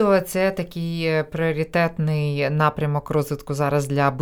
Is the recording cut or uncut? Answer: uncut